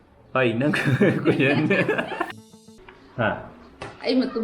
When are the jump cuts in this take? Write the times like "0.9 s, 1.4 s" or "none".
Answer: 2.4 s